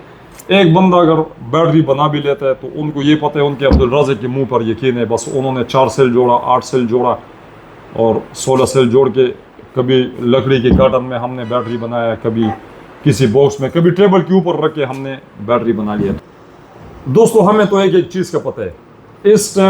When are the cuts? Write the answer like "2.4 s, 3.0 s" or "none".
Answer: 16.2 s